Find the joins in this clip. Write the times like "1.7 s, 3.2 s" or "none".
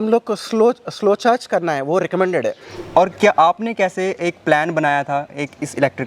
2.7 s